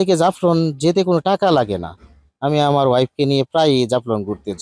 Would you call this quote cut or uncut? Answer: uncut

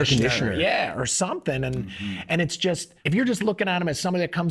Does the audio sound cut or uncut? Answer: cut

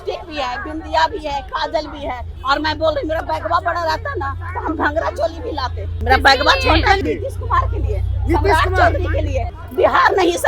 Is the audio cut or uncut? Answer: cut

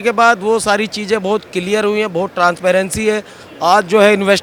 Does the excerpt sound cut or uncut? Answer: uncut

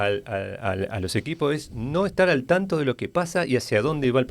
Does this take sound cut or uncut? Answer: uncut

